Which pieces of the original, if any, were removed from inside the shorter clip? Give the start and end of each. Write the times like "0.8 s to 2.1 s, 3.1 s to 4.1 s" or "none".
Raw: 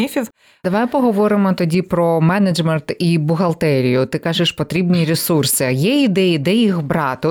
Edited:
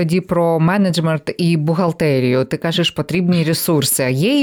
none

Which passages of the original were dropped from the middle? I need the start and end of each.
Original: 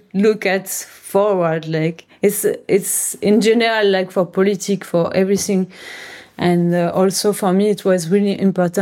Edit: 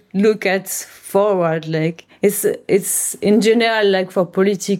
none

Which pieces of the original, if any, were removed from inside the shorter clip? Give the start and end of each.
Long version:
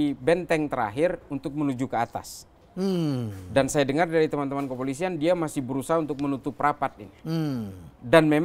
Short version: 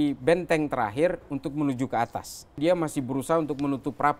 2.5 s to 5.2 s

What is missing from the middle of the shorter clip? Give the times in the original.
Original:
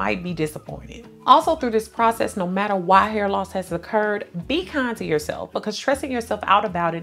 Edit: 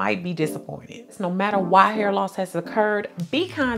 1.2 s to 2.3 s

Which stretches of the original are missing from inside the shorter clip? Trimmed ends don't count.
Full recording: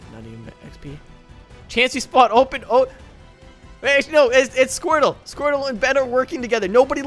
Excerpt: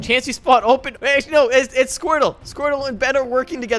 2.6 s to 3.7 s

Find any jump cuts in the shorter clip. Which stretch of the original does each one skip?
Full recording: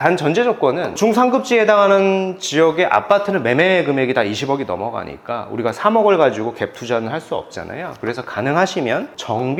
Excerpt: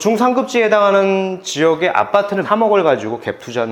3.4 s to 5.8 s

